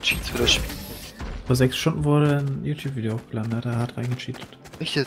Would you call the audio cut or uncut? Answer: uncut